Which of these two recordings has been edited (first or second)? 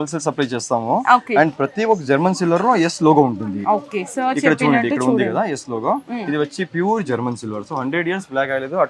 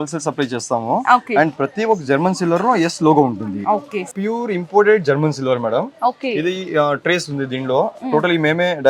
second